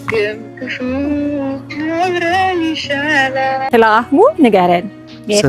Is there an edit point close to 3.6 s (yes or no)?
yes